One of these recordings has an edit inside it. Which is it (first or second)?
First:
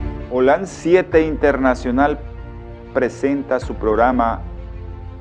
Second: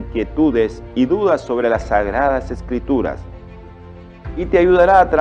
first